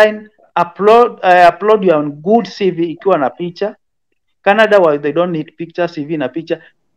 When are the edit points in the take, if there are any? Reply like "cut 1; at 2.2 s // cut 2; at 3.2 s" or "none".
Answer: none